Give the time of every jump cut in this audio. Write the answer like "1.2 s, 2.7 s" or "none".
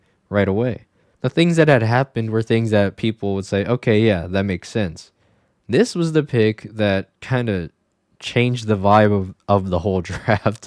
1.2 s